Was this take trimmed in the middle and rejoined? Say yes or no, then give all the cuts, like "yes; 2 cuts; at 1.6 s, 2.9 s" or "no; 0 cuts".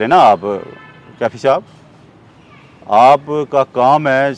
no; 0 cuts